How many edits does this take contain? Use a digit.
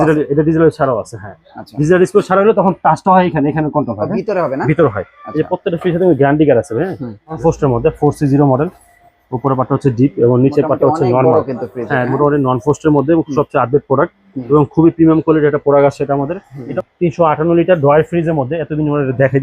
2